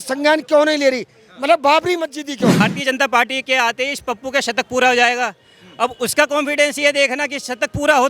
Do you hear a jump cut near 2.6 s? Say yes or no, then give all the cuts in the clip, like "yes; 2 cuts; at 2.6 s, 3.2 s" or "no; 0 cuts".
yes; 1 cut; at 2.6 s